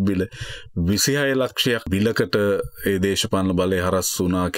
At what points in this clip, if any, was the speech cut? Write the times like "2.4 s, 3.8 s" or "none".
1.9 s